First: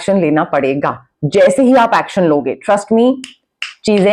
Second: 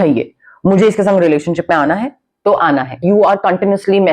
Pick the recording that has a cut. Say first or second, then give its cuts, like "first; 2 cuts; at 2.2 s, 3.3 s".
second; 1 cut; at 3.0 s